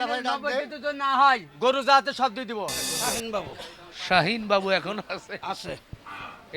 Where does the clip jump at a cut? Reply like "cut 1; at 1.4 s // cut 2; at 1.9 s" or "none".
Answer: cut 1; at 2.9 s